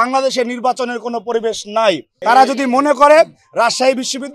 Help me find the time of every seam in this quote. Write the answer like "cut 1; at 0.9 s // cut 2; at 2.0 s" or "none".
cut 1; at 2.1 s